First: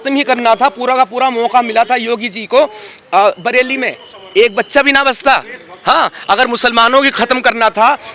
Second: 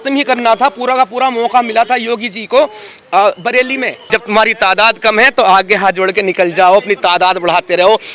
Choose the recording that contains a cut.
second; 1 cut; at 4.0 s

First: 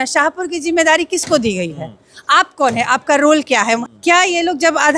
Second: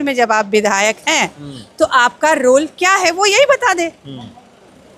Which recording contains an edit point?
first; 1 cut; at 3.8 s

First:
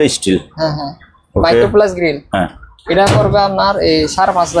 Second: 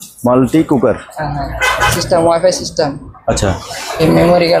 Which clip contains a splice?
second; 1 cut; at 1.9 s

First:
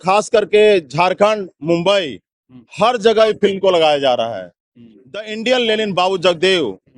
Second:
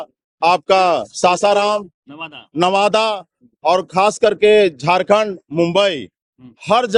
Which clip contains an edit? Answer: first; 1 cut; at 5.3 s

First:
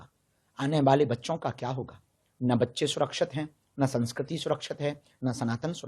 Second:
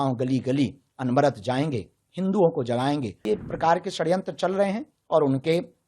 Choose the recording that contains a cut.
second; 1 cut; at 3.2 s

